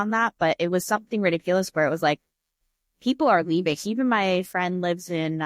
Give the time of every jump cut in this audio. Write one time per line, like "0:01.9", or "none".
0:03.8